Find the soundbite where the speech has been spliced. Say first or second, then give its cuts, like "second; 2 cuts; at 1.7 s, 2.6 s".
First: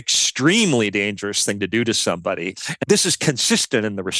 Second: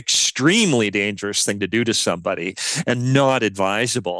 first; 1 cut; at 2.6 s